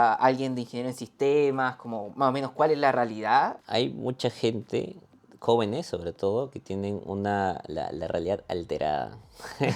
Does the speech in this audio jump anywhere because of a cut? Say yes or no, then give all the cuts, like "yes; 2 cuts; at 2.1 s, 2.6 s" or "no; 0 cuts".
yes; 1 cut; at 3.6 s